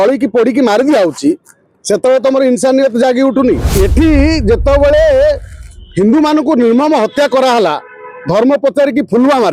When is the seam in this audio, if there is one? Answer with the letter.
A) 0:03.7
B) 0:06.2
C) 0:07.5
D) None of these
A